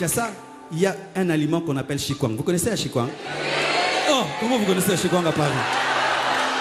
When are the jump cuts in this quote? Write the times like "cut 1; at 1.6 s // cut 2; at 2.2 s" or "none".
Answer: none